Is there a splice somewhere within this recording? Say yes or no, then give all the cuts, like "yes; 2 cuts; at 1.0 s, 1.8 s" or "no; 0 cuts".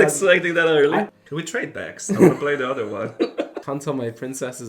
yes; 2 cuts; at 1.1 s, 3.6 s